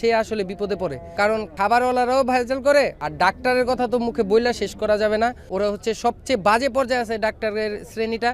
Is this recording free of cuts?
no; 3 cuts; at 1.3 s, 3.0 s, 5.4 s

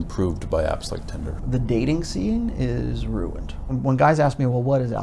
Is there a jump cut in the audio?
yes; 2 cuts; at 1.4 s, 3.7 s

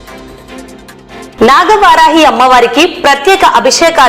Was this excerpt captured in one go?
no; 1 cut; at 1.3 s

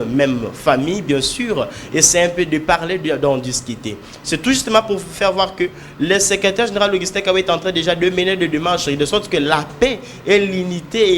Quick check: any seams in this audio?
no; 0 cuts

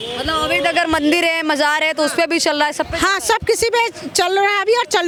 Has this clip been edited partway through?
no; 0 cuts

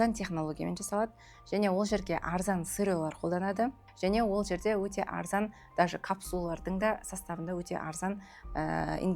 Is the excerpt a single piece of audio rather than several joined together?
no; 1 cut; at 3.8 s

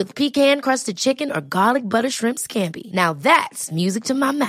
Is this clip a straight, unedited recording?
yes; 0 cuts

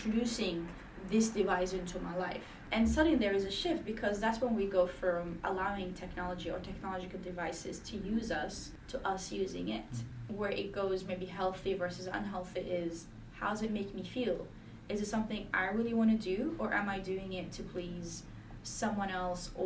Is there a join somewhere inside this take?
yes; 3 cuts; at 2.5 s, 8.7 s, 10.3 s

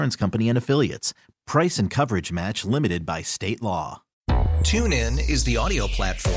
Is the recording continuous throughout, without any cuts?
no; 1 cut; at 4.1 s

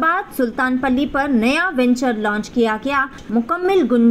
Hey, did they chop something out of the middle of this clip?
yes; 1 cut; at 3.2 s

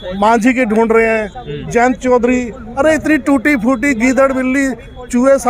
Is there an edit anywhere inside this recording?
no; 0 cuts

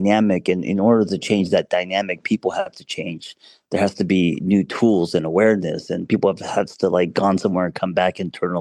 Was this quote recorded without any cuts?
yes; 0 cuts

